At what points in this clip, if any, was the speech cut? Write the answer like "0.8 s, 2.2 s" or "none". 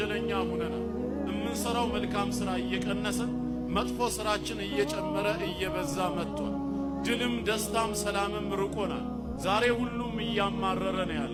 none